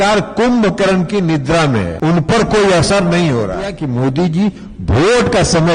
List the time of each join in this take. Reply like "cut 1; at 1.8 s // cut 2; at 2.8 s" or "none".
cut 1; at 1.9 s // cut 2; at 3.8 s

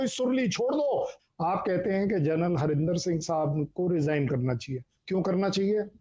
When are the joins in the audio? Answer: cut 1; at 1.1 s

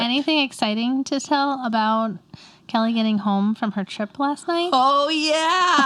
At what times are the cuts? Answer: none

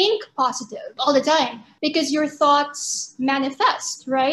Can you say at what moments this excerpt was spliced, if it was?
cut 1; at 1.0 s // cut 2; at 1.6 s

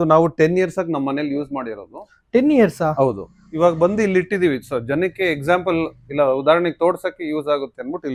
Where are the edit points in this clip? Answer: none

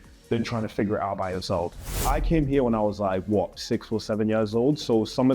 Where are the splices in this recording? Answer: cut 1; at 2.0 s

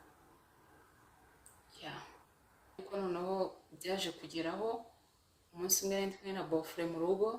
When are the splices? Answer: cut 1; at 2.8 s

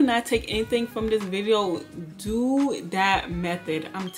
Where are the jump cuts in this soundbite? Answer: none

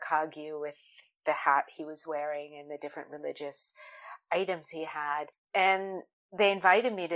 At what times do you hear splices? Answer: cut 1; at 5.4 s

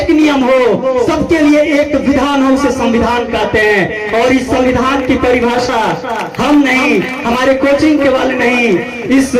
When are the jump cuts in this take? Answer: none

